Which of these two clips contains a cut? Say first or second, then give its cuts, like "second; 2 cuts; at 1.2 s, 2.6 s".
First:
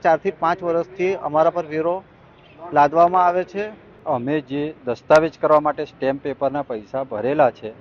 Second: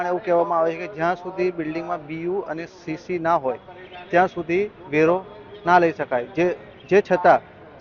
first; 1 cut; at 3.9 s